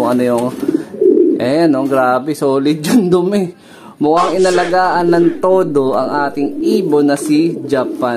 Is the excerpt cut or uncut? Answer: uncut